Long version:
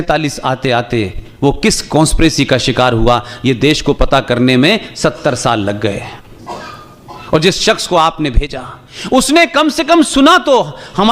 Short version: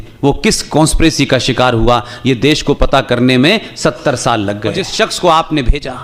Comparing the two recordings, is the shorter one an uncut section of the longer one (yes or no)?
no